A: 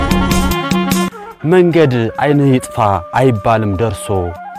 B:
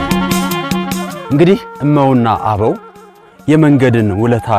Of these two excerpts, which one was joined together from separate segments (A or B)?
A